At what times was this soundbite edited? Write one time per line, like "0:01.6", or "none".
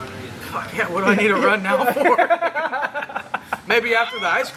none